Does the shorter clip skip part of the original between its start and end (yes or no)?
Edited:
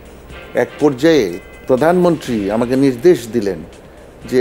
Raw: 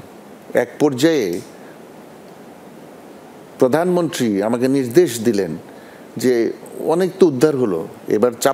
yes